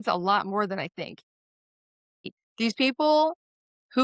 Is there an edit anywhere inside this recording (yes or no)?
yes